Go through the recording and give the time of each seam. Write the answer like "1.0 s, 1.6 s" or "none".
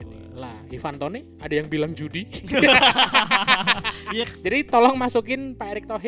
4.3 s